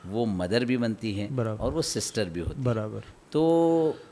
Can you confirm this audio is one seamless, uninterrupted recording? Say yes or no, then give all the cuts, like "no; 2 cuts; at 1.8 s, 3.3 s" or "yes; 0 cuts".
yes; 0 cuts